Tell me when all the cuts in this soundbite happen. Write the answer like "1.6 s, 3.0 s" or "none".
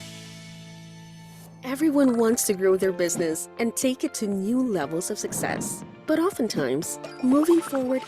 1.5 s